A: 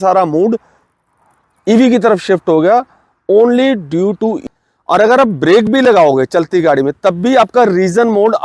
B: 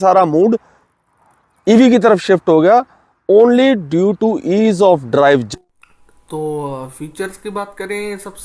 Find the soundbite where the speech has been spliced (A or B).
A